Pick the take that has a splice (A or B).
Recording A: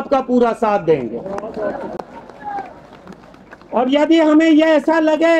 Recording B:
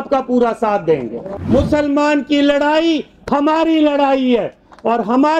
B